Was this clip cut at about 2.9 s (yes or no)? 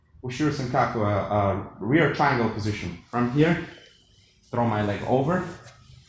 yes